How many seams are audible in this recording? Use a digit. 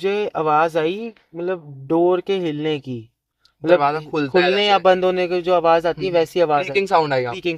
0